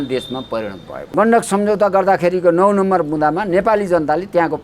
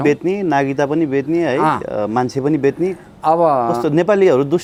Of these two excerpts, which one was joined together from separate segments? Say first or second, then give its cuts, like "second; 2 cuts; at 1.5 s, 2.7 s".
first; 1 cut; at 1.1 s